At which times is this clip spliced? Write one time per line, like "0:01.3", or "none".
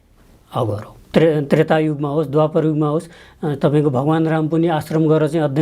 0:01.1